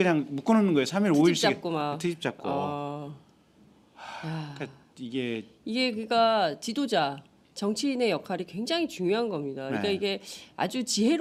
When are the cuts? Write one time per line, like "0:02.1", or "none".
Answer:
none